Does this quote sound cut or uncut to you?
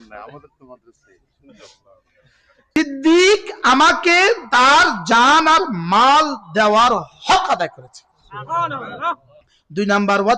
cut